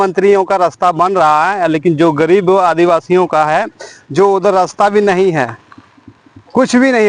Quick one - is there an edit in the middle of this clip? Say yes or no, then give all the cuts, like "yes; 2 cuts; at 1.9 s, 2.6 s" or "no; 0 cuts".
no; 0 cuts